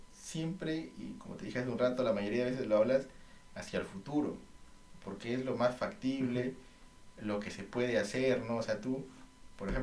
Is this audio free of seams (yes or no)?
yes